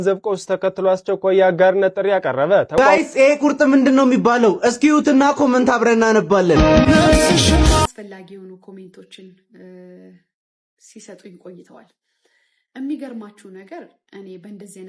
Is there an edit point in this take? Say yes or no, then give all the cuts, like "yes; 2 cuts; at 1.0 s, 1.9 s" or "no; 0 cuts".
yes; 2 cuts; at 2.7 s, 7.9 s